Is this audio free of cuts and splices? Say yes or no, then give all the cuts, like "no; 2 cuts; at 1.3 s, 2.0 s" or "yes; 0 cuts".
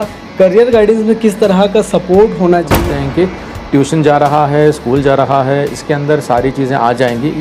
no; 1 cut; at 2.7 s